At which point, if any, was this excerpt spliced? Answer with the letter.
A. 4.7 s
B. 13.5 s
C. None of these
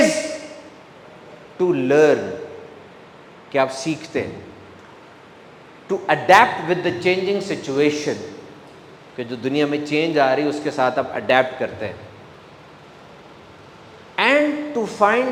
C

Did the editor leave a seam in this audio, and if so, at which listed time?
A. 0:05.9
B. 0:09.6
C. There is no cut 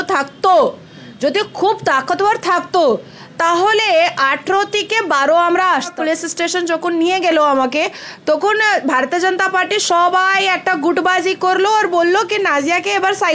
A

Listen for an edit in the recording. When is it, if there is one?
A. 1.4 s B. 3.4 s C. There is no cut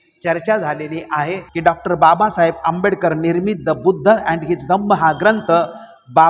A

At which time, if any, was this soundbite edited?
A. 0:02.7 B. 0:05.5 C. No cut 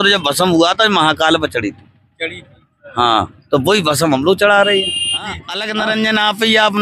B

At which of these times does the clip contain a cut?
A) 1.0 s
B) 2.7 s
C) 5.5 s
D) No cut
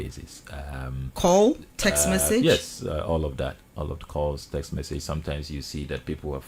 D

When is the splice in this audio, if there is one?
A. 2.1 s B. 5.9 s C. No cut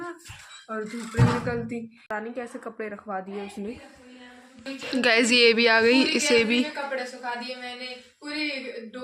A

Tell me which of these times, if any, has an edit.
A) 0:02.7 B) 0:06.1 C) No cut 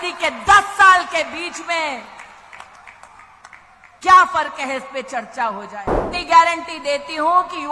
B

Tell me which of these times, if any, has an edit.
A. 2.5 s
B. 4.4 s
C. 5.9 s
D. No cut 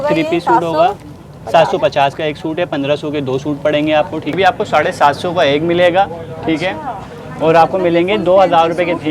B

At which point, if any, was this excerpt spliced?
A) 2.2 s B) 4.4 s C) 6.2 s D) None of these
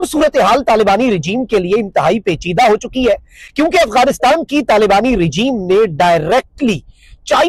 D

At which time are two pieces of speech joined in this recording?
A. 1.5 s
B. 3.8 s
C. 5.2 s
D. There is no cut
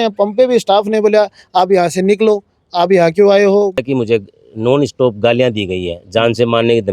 B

